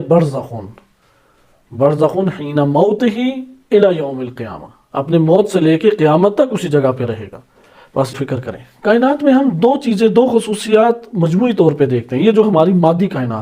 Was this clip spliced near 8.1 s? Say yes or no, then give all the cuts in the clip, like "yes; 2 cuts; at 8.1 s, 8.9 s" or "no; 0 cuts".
yes; 1 cut; at 8.1 s